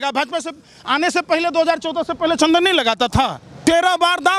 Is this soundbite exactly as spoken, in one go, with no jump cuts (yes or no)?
no